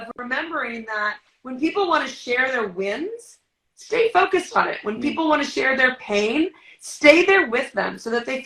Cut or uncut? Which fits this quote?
uncut